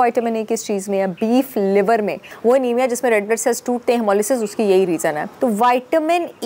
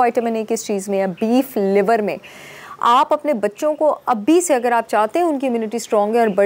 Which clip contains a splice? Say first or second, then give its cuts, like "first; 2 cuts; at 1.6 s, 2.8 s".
first; 2 cuts; at 2.3 s, 5.3 s